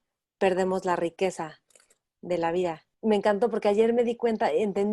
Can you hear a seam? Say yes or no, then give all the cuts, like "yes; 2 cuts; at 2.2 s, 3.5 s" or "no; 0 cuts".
yes; 1 cut; at 2.9 s